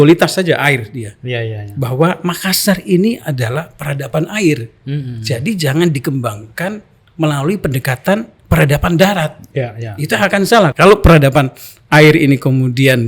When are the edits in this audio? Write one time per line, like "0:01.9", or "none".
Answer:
0:10.7